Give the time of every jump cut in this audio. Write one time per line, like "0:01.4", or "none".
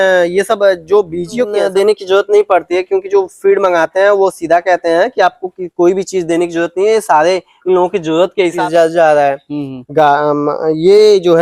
0:01.6
0:08.6